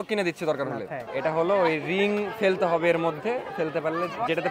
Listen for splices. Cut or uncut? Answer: cut